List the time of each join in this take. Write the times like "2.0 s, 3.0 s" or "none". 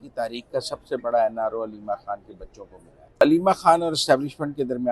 3.2 s